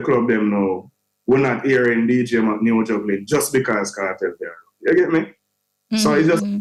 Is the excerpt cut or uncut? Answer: uncut